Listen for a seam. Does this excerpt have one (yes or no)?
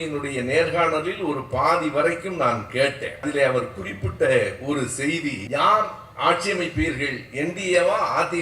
yes